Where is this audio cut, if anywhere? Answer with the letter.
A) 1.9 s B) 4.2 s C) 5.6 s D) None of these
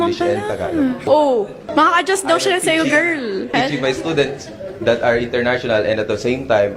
B